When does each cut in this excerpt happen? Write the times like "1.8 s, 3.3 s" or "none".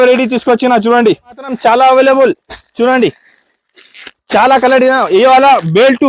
1.5 s